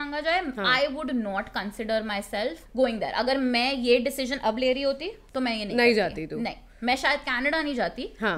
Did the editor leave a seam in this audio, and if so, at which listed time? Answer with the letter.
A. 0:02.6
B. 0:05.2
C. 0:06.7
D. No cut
A